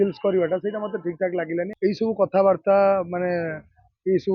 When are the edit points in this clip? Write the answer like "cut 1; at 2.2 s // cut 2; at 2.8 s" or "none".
cut 1; at 1.7 s